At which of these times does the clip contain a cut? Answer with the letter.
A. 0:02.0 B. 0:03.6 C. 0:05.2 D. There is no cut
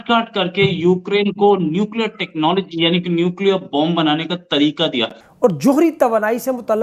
C